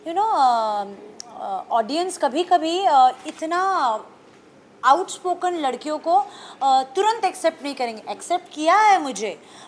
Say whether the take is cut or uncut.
uncut